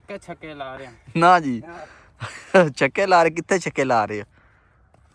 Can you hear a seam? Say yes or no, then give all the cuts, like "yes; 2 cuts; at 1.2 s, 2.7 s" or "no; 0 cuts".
no; 0 cuts